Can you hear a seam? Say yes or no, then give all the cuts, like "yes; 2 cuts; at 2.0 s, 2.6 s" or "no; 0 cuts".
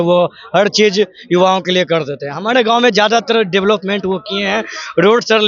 no; 0 cuts